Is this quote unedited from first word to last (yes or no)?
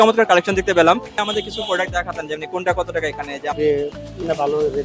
no